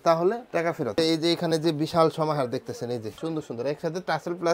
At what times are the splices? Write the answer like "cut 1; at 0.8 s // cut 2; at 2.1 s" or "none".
cut 1; at 1.0 s // cut 2; at 3.2 s